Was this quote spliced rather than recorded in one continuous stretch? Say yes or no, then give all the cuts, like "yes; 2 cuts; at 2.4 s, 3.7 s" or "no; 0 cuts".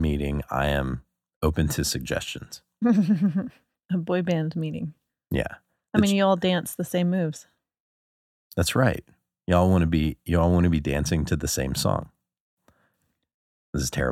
no; 0 cuts